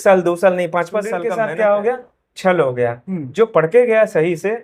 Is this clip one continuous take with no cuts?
no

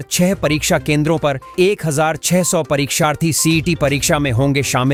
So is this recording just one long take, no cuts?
yes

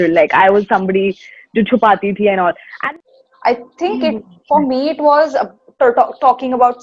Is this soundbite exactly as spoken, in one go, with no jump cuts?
no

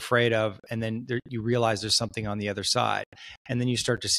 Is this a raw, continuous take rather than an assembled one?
yes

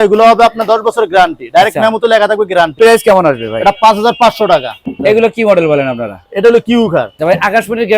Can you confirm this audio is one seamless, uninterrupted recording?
no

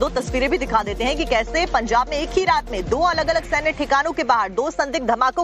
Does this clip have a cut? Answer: no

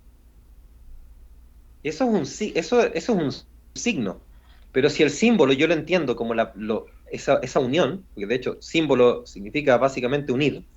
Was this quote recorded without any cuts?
yes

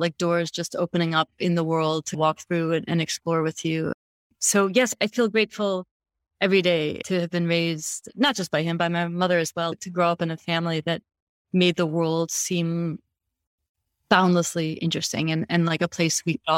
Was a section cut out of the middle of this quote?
no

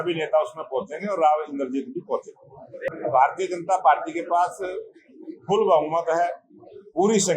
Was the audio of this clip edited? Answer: yes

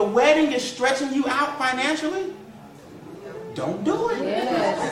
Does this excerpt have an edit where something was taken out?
no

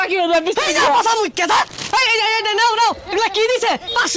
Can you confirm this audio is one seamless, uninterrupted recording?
yes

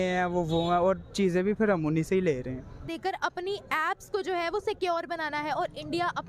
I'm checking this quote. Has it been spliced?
yes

